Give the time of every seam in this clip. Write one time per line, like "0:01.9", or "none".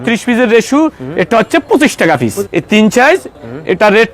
0:02.4